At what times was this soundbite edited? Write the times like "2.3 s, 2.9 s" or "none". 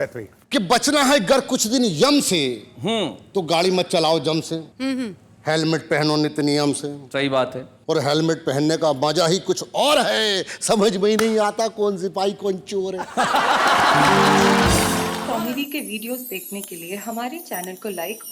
15.0 s

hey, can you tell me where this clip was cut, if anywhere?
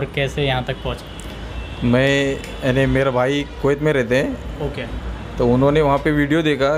none

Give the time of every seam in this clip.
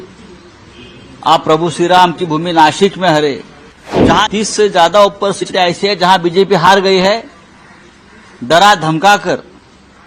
4.2 s

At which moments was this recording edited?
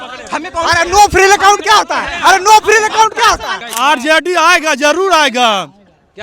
3.6 s

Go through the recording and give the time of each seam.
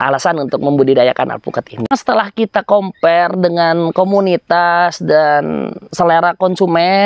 1.9 s

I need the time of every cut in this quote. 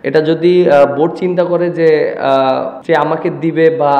2.7 s

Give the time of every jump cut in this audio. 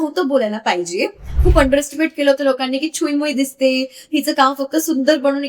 1.4 s

